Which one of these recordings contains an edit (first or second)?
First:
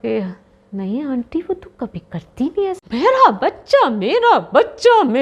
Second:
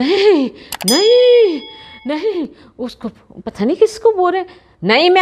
first